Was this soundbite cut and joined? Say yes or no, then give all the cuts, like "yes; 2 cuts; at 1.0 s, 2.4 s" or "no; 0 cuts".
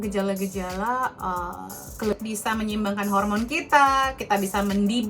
yes; 1 cut; at 2.1 s